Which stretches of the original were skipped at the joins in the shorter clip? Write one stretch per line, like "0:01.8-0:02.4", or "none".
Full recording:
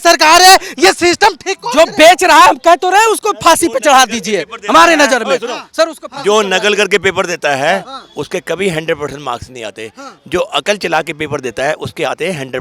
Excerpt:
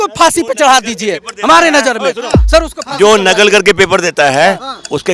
none

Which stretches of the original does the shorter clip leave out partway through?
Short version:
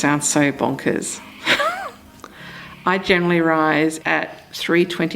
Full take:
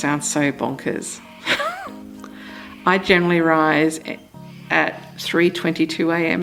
0:04.0-0:04.7

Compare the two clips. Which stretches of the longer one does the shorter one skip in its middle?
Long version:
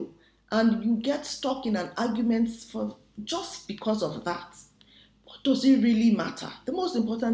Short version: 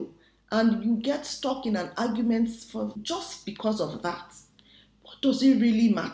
0:03.0-0:03.2

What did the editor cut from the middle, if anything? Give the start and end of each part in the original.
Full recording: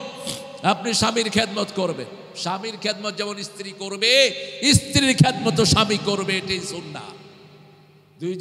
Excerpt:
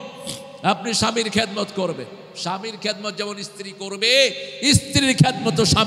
none

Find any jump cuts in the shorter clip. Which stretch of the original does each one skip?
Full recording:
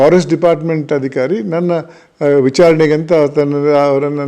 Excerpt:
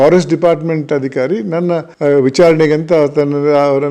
0:01.9-0:02.1

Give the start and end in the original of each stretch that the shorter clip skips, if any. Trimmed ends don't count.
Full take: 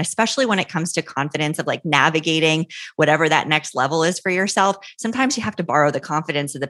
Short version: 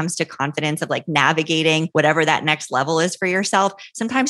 0:02.7-0:02.9

